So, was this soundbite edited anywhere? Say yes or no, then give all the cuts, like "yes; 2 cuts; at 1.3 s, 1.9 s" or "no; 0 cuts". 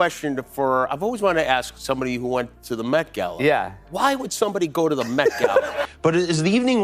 yes; 1 cut; at 5.8 s